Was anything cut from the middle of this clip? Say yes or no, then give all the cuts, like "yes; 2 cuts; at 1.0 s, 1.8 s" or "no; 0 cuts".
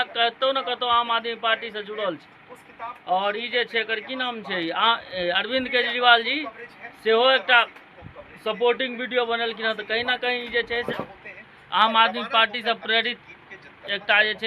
no; 0 cuts